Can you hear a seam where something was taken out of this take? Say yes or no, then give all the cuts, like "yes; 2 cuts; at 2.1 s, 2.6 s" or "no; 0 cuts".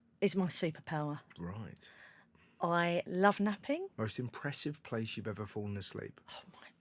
no; 0 cuts